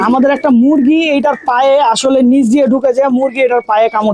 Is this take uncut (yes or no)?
yes